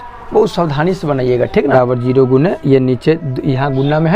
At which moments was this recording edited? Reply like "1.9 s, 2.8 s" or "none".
1.7 s